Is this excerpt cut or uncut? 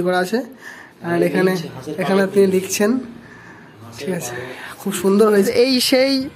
cut